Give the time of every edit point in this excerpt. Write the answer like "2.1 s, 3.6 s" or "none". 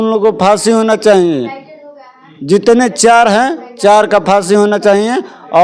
none